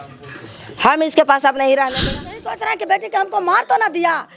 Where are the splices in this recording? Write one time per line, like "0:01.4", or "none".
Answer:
0:02.4